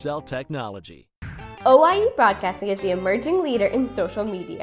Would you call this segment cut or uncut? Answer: cut